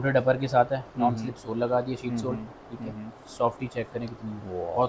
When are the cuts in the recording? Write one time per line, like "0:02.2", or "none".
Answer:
none

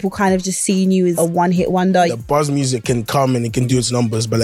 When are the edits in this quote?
0:01.2
0:02.2
0:03.7

